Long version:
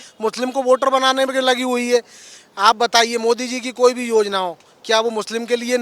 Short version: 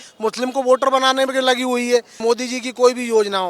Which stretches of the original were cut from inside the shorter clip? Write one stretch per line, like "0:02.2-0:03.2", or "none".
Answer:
0:02.2-0:03.2